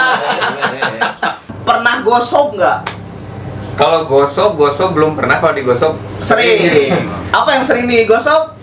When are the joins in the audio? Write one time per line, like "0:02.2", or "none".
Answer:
0:01.5